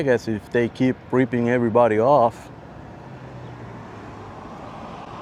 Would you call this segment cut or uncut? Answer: uncut